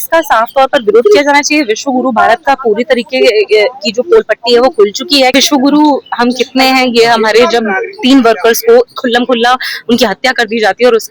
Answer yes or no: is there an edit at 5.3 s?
yes